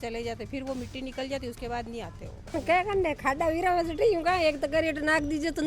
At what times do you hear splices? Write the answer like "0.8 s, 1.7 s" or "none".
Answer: 2.5 s

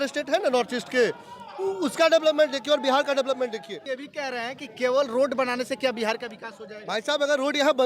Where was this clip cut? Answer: 3.9 s

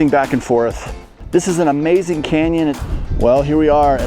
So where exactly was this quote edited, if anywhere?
1.1 s, 2.8 s

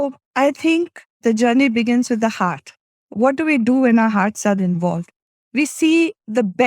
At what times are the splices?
1.0 s

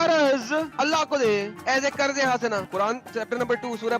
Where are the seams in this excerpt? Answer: 2.6 s

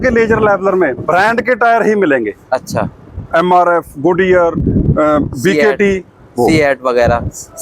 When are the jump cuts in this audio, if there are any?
none

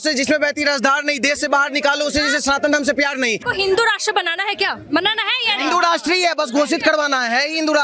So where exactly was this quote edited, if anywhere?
3.4 s

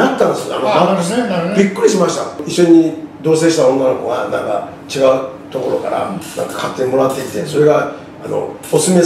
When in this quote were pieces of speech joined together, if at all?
2.3 s

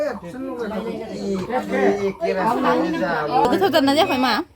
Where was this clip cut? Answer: 3.4 s

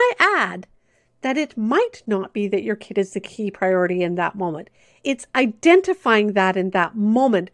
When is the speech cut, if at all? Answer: 5.0 s

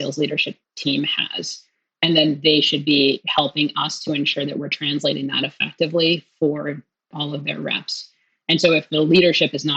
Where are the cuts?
7.1 s, 8.9 s

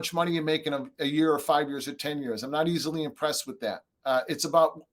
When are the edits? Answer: 3.9 s

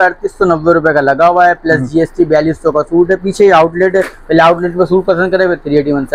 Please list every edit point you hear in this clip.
none

